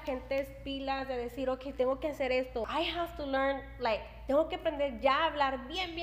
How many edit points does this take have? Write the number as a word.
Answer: one